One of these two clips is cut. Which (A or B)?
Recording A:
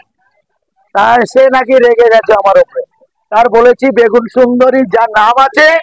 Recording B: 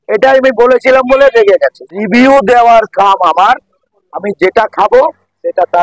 B